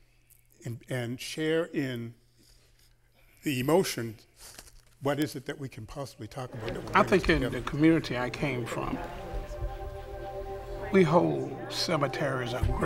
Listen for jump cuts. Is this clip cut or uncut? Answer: cut